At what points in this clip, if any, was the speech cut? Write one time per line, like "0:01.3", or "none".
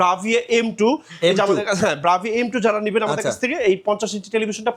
none